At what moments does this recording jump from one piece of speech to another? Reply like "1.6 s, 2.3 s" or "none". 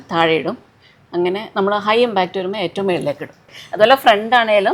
3.5 s